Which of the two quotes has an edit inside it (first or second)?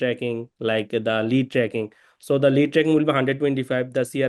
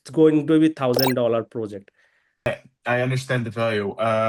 second